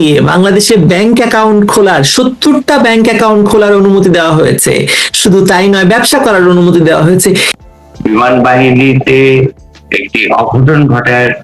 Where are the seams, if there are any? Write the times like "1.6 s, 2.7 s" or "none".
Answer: 7.5 s

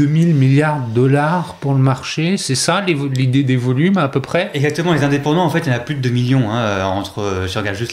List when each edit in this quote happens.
none

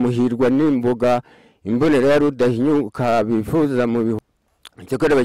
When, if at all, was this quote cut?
4.2 s

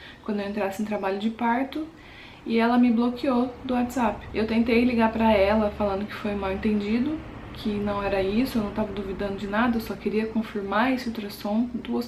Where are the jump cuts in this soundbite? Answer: none

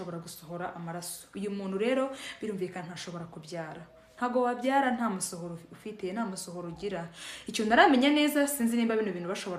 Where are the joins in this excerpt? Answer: none

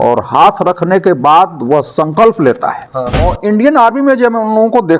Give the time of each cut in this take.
3.2 s

